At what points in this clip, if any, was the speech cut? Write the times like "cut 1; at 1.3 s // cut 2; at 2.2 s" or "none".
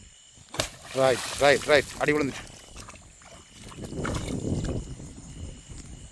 none